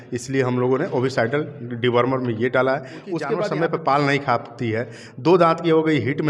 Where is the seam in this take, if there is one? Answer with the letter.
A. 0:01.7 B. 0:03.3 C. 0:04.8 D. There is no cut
B